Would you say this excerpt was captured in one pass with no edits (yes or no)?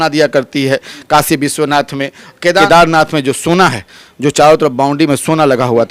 no